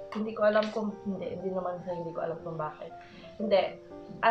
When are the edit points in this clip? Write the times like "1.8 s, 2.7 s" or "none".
none

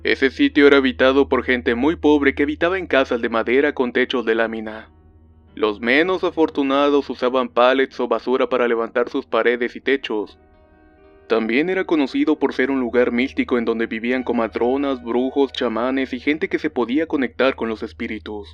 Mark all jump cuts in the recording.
6.9 s

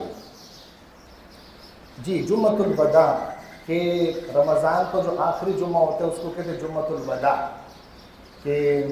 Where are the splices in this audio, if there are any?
1.0 s

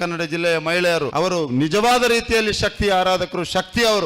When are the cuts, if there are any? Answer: 1.1 s

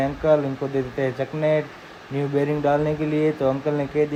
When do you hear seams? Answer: none

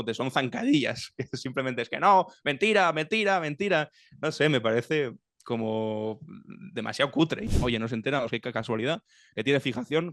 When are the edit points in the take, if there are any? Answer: 7.5 s

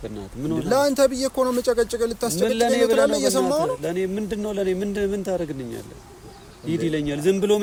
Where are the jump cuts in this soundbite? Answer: none

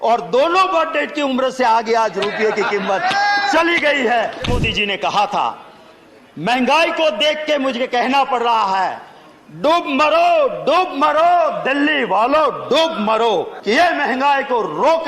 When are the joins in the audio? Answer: 4.5 s, 13.5 s

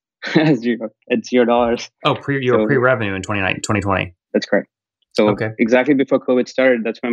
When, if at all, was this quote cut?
4.2 s

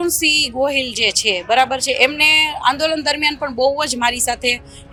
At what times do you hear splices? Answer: none

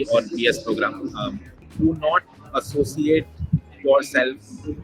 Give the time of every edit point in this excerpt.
1.6 s

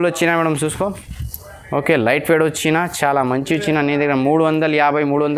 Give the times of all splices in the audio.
none

